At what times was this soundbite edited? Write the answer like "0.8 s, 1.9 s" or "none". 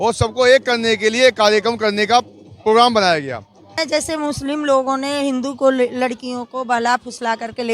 3.8 s